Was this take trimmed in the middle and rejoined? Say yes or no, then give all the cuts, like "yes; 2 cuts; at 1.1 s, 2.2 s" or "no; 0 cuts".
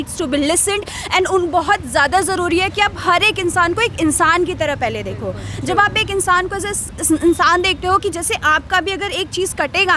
no; 0 cuts